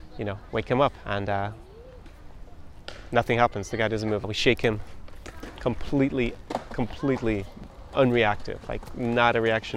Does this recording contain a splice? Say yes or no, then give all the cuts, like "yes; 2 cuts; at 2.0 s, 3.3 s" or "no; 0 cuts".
yes; 2 cuts; at 1.0 s, 4.2 s